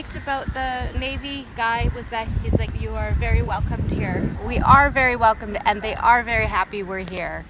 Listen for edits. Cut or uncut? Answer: cut